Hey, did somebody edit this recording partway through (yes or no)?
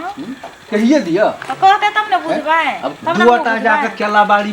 yes